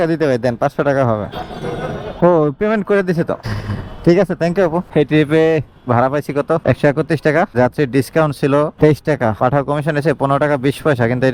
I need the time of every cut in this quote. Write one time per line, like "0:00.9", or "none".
none